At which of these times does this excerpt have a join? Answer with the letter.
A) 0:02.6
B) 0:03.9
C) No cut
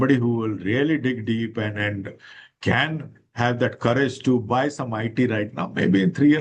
C